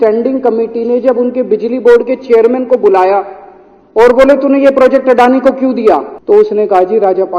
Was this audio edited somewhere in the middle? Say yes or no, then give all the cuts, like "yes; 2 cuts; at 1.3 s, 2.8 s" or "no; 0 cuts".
yes; 1 cut; at 6.1 s